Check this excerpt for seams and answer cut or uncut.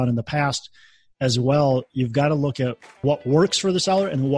uncut